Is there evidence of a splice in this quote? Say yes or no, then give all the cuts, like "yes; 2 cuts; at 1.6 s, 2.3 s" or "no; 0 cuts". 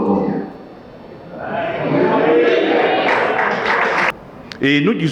yes; 1 cut; at 4.1 s